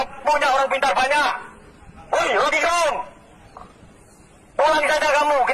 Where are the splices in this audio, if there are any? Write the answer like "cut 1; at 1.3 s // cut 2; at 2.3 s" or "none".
none